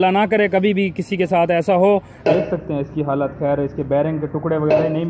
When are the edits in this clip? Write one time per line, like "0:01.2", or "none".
0:02.2